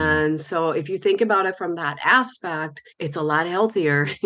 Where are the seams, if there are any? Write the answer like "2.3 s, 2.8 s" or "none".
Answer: none